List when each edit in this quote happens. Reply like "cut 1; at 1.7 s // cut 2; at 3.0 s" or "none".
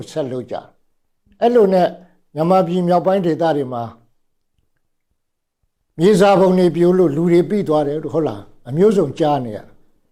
none